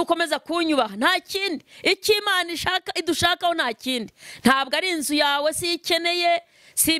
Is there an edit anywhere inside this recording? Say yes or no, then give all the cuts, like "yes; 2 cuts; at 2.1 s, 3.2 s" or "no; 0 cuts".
no; 0 cuts